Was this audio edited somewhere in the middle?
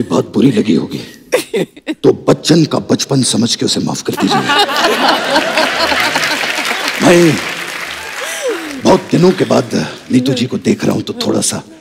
no; 0 cuts

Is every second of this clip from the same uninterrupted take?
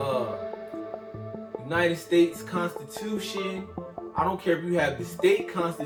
yes; 0 cuts

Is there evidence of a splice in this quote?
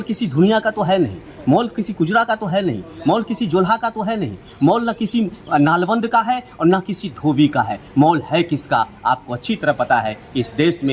no; 0 cuts

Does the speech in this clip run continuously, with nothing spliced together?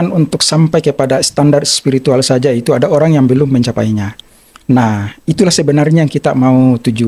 yes; 0 cuts

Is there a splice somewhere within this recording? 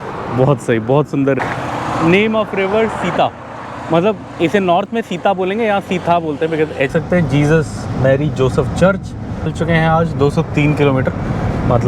yes; 3 cuts; at 1.4 s, 6.9 s, 9.5 s

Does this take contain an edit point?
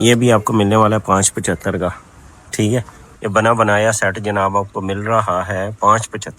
yes; 1 cut; at 3.0 s

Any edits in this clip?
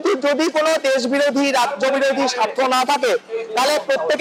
no; 0 cuts

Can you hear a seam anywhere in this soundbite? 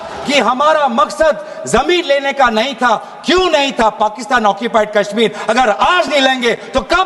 no; 0 cuts

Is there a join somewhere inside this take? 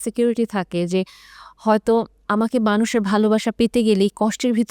no; 0 cuts

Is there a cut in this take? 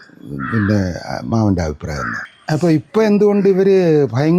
yes; 1 cut; at 2.1 s

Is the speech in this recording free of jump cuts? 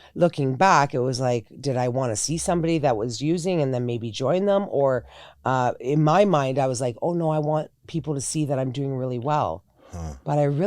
yes; 0 cuts

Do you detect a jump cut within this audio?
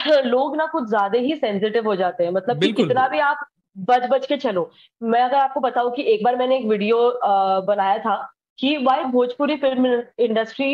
no; 0 cuts

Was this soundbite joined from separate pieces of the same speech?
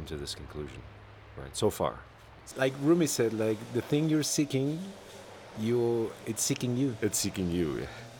yes; 1 cut; at 2.5 s

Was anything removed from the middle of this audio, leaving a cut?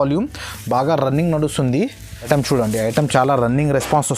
yes; 1 cut; at 2.1 s

